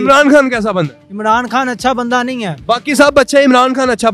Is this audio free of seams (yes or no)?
yes